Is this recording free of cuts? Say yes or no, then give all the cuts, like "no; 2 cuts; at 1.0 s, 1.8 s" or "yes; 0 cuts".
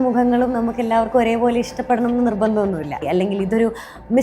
no; 1 cut; at 3.0 s